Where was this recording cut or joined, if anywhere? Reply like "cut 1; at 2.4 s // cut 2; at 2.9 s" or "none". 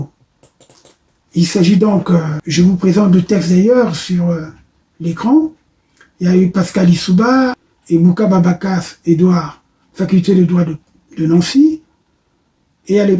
cut 1; at 2.4 s // cut 2; at 7.6 s